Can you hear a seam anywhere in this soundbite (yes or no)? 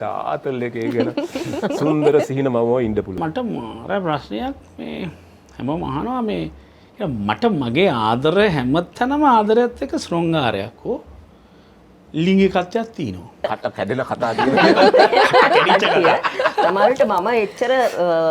yes